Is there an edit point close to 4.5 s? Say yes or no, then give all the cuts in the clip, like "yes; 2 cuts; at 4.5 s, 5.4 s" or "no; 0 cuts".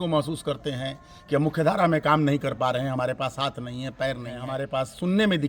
yes; 1 cut; at 4.5 s